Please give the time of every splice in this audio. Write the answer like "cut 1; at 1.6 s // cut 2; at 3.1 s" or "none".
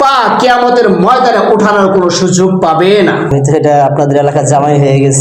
cut 1; at 3.3 s